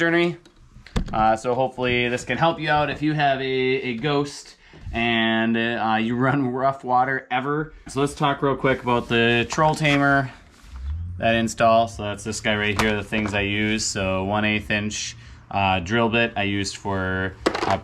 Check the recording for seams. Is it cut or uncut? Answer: cut